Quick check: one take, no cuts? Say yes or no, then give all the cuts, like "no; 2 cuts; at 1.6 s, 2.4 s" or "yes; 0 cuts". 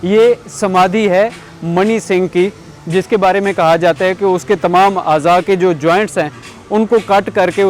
yes; 0 cuts